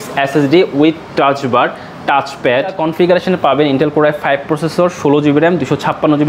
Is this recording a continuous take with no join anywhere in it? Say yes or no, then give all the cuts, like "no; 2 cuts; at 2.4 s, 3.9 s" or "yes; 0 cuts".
no; 1 cut; at 2.7 s